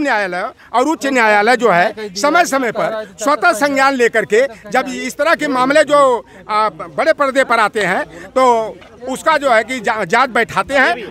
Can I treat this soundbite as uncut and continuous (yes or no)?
yes